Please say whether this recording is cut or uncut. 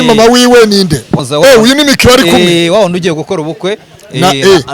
cut